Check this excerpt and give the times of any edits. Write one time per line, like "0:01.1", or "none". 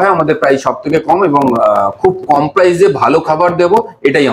none